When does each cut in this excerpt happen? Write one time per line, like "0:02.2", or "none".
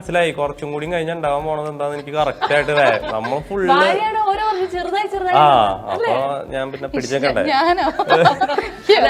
none